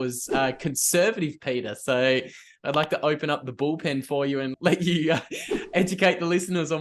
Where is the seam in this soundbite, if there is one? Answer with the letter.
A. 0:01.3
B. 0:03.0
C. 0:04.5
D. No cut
C